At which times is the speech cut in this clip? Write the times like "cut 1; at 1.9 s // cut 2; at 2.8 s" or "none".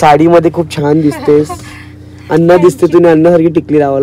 none